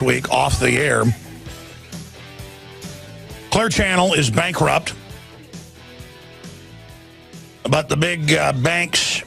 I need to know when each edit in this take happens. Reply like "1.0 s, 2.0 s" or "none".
4.9 s